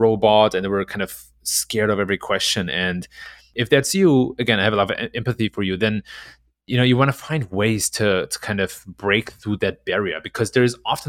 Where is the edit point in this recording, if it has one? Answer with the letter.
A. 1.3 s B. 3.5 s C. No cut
B